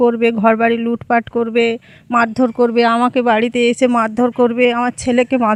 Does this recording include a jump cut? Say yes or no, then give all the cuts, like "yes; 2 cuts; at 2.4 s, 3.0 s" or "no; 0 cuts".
no; 0 cuts